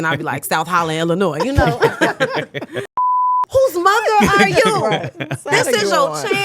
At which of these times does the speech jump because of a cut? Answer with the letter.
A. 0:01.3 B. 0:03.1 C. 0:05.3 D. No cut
B